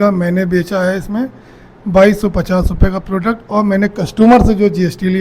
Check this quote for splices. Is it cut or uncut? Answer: uncut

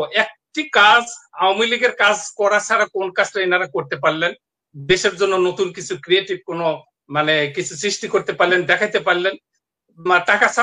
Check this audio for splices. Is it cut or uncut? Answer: uncut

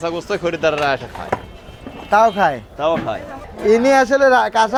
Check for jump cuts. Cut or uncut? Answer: uncut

